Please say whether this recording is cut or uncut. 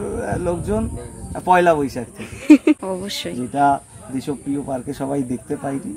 cut